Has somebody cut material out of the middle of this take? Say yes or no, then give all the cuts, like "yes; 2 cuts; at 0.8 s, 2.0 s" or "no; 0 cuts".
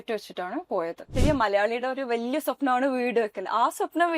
yes; 1 cut; at 1.1 s